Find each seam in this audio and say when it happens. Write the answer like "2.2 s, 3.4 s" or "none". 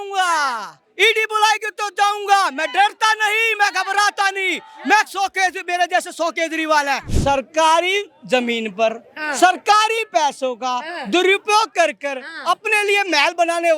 7.1 s